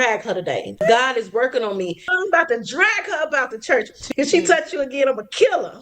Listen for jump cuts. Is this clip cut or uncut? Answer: cut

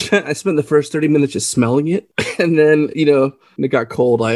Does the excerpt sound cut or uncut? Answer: cut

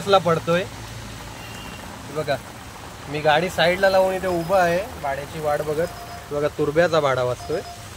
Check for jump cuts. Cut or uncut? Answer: uncut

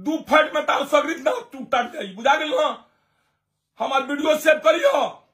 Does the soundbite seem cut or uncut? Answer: uncut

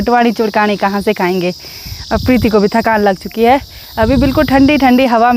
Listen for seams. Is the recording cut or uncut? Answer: uncut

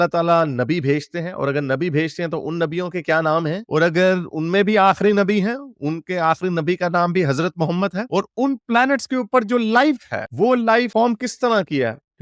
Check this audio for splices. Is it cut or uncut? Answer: uncut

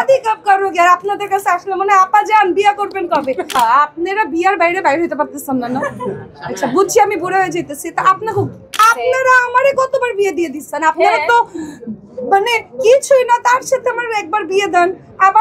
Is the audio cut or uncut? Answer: cut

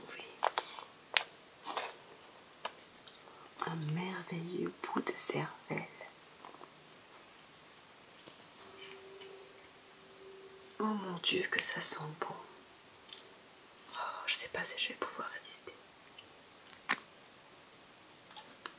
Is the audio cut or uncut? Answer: cut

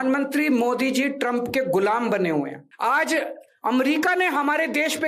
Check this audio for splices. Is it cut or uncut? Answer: cut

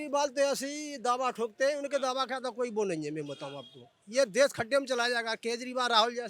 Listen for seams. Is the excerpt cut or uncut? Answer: uncut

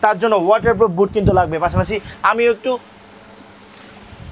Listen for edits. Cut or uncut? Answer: uncut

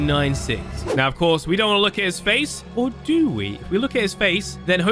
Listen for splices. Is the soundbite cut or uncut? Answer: cut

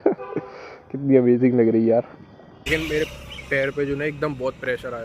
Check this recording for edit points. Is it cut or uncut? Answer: cut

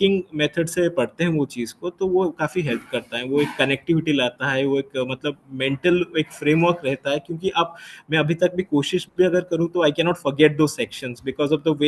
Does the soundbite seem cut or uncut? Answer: uncut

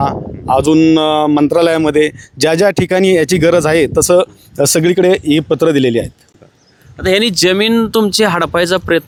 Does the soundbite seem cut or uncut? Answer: uncut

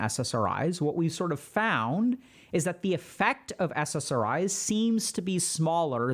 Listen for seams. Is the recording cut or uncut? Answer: uncut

